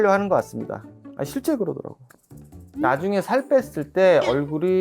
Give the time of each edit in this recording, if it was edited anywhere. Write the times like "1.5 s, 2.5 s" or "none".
2.7 s